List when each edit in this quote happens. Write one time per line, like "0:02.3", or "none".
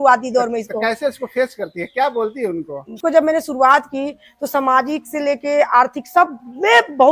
0:02.8